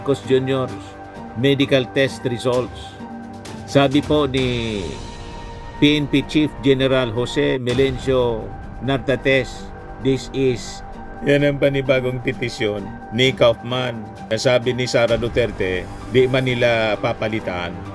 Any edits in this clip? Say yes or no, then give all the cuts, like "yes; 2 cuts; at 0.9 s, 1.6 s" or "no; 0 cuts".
yes; 1 cut; at 11.1 s